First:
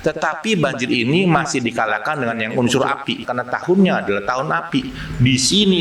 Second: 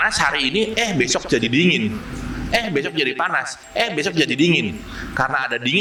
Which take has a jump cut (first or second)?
first